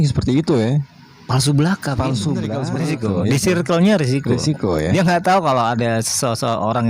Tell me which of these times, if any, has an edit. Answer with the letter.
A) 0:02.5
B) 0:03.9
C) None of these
A